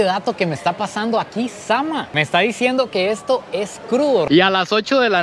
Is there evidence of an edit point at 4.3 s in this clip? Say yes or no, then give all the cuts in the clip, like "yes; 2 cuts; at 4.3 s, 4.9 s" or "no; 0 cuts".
yes; 1 cut; at 4.3 s